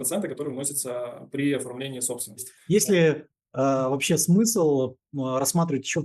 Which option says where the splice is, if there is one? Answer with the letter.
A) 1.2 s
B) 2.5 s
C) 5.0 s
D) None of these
B